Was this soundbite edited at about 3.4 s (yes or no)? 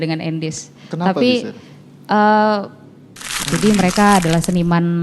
yes